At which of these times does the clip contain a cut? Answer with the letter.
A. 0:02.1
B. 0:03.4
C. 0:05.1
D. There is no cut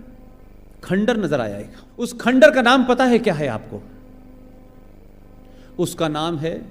A